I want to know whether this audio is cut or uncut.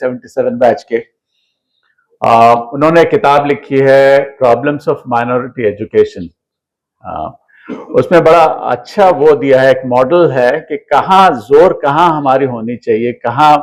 uncut